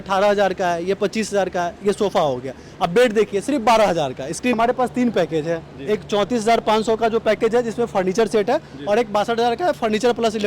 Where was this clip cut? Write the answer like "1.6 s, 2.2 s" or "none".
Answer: 4.5 s